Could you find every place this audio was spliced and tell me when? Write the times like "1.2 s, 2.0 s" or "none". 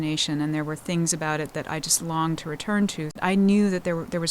3.2 s

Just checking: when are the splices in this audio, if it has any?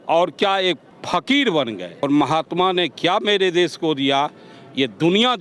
0.9 s, 2.0 s

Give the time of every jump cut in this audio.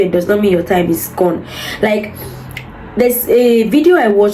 none

